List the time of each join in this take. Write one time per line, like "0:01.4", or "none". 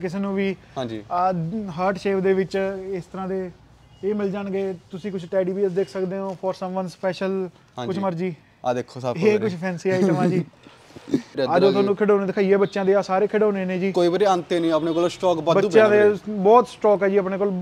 0:11.3